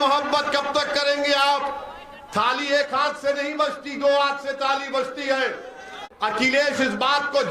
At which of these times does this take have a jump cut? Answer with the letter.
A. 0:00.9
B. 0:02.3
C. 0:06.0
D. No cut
C